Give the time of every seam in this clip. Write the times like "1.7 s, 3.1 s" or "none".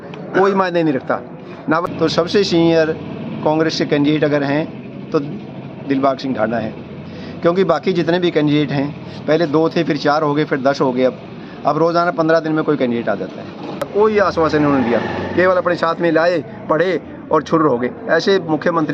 1.9 s, 13.9 s